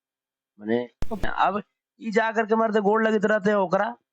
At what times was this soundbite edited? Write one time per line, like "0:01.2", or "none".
0:01.2